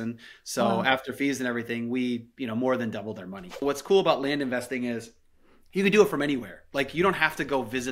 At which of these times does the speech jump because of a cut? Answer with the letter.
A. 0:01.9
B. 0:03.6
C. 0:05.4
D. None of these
B